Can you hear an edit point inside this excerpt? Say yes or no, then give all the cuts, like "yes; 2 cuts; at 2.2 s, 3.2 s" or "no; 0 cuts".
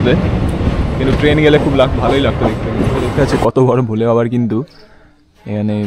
yes; 1 cut; at 3.1 s